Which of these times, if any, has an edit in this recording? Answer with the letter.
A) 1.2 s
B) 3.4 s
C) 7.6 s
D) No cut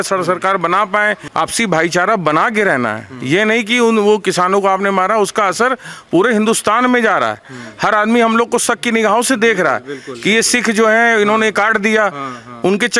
A